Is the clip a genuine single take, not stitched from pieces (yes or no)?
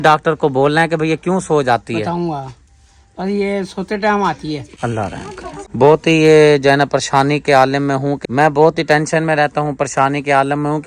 yes